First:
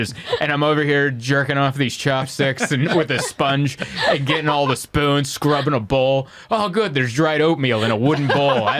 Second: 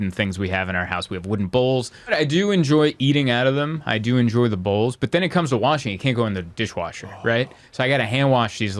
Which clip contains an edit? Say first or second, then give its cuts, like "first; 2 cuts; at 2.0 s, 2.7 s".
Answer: second; 1 cut; at 2.1 s